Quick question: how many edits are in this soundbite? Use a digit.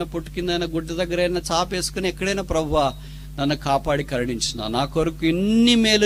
0